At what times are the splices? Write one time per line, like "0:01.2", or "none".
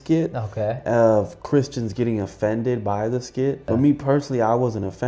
0:03.6

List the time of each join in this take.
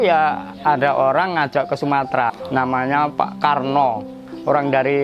0:02.4

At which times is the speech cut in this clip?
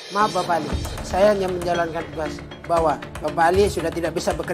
none

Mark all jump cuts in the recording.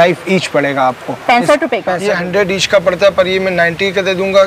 0:01.9

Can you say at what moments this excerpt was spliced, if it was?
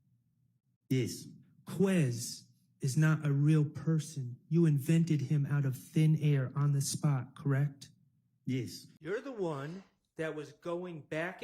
0:08.9

